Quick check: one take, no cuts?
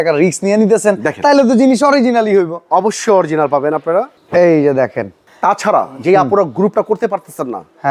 yes; 0 cuts

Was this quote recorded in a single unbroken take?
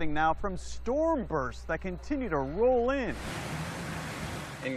no; 1 cut; at 3.8 s

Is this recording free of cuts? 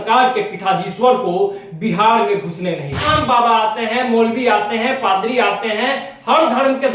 no; 1 cut; at 3.1 s

